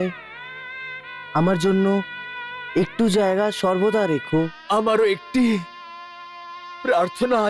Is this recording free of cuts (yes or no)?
no